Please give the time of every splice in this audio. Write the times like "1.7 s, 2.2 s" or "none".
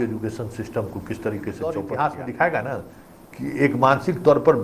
1.6 s